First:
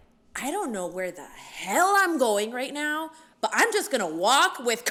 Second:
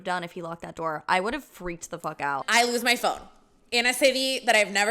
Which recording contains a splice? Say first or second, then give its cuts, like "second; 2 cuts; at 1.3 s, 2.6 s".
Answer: second; 1 cut; at 2.5 s